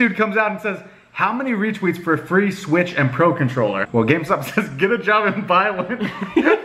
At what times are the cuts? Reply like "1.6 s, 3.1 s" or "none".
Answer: none